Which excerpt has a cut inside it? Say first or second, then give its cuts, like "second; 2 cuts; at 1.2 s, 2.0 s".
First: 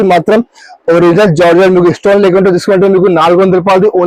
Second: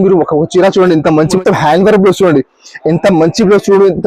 second; 1 cut; at 1.4 s